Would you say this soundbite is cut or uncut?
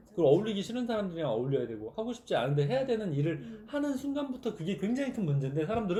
uncut